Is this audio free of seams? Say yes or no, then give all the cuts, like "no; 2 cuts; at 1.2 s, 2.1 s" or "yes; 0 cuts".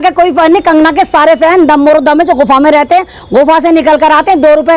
yes; 0 cuts